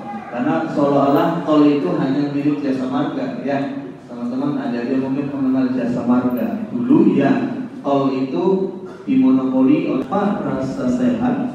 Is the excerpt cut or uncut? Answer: cut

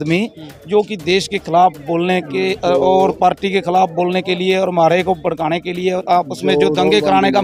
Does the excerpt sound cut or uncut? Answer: uncut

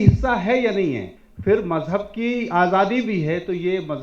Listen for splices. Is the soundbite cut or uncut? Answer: cut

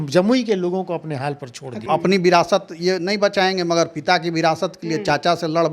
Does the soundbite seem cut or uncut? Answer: cut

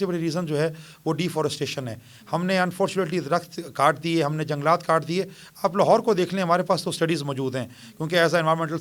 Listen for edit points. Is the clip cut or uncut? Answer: uncut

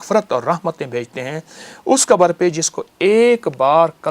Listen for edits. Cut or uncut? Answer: uncut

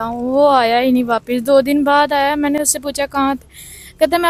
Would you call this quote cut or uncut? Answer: uncut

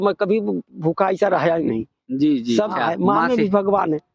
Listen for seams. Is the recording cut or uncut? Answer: cut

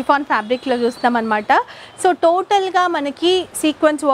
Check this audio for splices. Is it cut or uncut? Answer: uncut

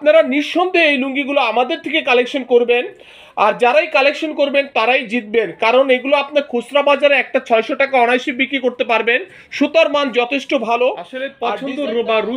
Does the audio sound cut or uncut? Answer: cut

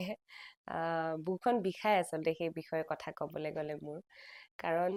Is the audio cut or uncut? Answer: uncut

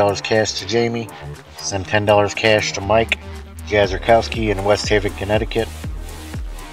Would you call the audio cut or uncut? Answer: uncut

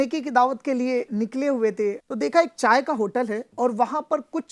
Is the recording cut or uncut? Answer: cut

